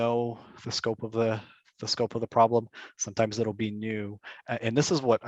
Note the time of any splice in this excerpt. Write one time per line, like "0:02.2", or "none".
none